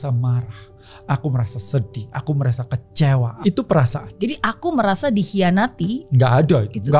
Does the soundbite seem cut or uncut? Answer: cut